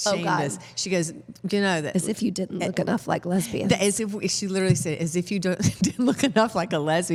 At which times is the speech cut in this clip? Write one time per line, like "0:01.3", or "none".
none